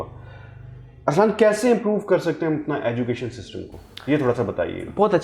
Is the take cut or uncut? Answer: uncut